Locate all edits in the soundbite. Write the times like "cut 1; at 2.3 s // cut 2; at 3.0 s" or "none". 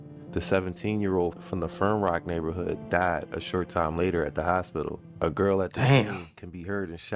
cut 1; at 5.1 s

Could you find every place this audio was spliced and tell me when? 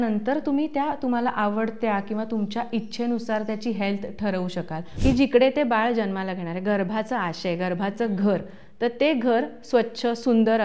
cut 1; at 4.8 s

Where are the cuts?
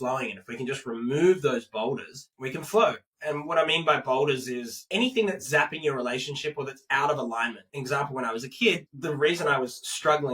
cut 1; at 4.8 s // cut 2; at 7.6 s // cut 3; at 8.9 s

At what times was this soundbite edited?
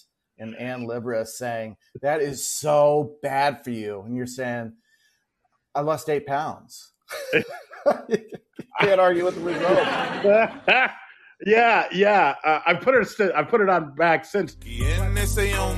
cut 1; at 14.8 s

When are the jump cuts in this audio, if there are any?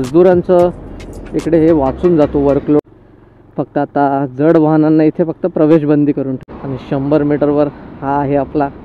cut 1; at 2.8 s // cut 2; at 6.5 s

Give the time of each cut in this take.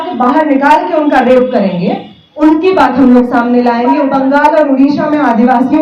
cut 1; at 4.1 s

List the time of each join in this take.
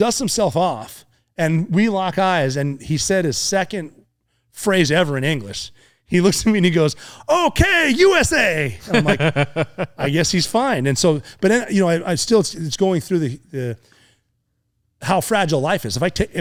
none

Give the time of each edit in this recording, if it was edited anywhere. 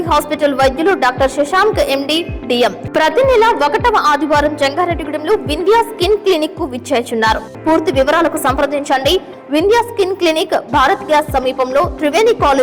cut 1; at 2.8 s // cut 2; at 7.5 s

